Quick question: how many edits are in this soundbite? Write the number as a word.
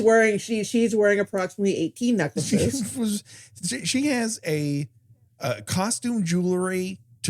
one